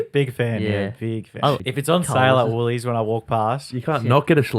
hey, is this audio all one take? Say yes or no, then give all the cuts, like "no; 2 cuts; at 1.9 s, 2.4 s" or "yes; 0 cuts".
no; 1 cut; at 1.6 s